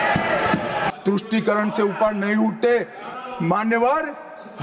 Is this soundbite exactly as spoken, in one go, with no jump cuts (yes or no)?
no